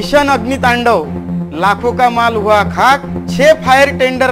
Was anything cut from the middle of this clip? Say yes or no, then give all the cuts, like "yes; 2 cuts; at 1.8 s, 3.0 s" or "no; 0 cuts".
no; 0 cuts